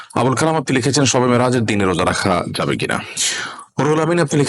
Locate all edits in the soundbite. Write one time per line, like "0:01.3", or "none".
0:03.2